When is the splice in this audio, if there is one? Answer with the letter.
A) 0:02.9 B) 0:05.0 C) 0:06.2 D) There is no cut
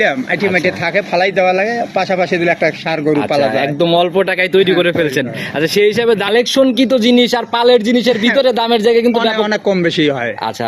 C